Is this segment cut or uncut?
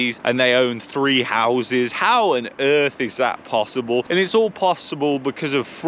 uncut